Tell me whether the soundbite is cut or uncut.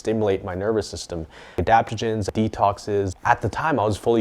cut